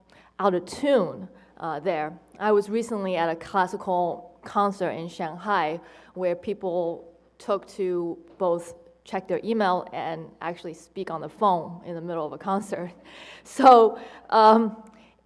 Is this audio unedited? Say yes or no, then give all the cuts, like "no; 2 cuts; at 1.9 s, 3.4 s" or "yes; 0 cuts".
yes; 0 cuts